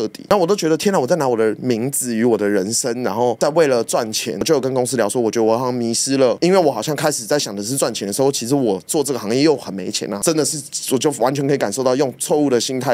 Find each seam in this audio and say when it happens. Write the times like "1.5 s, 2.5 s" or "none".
6.4 s

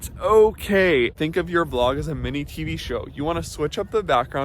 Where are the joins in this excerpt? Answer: 1.1 s

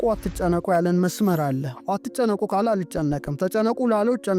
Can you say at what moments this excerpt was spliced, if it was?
none

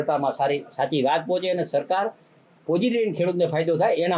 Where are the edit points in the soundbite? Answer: none

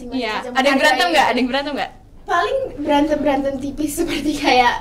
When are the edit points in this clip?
none

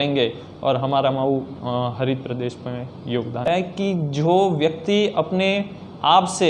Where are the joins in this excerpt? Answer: 3.5 s

